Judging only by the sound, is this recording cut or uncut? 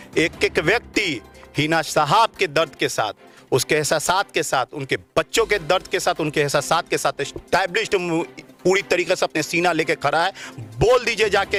uncut